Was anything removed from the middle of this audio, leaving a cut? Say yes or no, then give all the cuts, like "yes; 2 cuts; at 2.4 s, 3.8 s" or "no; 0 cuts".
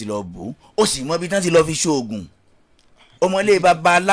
no; 0 cuts